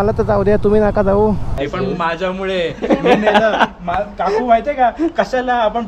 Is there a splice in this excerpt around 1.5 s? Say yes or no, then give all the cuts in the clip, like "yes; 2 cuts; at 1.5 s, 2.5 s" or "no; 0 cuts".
yes; 1 cut; at 1.5 s